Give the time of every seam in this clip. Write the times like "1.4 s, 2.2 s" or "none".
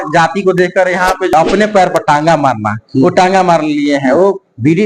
1.3 s